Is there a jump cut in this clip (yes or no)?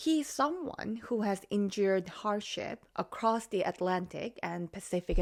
no